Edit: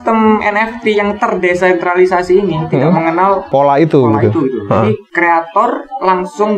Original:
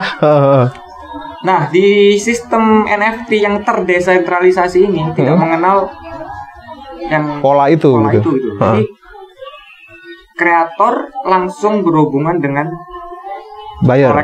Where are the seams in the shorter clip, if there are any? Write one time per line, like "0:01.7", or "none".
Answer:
0:03.4
0:05.1